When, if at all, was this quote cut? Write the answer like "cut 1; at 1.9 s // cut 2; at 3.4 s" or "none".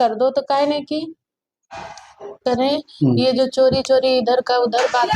cut 1; at 2.4 s